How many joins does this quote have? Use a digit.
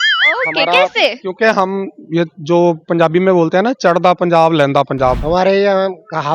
1